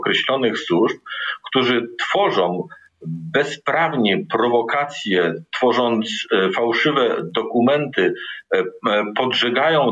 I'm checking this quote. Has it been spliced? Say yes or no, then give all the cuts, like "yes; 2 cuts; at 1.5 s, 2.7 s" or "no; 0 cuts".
no; 0 cuts